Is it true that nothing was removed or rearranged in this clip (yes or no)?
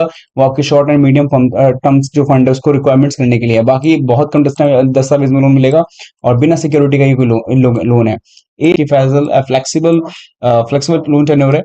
no